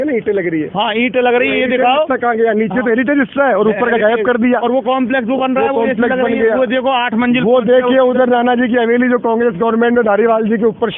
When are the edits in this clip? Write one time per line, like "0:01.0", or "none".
none